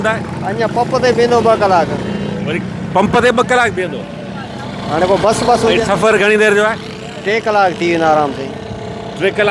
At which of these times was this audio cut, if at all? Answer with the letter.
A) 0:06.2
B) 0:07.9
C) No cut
C